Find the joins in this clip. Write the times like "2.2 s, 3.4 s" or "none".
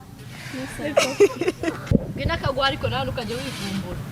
1.9 s